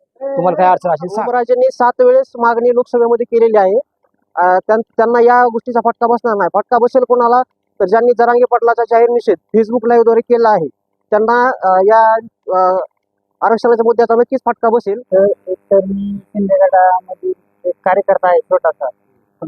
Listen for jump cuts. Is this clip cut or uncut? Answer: cut